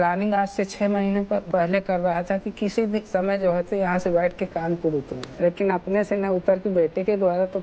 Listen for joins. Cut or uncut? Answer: cut